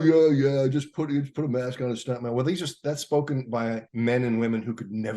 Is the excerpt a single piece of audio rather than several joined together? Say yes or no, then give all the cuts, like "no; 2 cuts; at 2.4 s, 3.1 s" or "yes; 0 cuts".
no; 1 cut; at 3.9 s